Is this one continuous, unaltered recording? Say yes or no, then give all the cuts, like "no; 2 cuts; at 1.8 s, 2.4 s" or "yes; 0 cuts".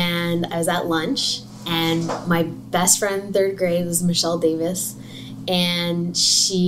yes; 0 cuts